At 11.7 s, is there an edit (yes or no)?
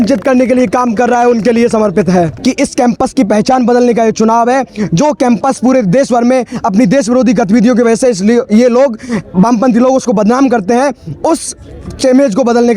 no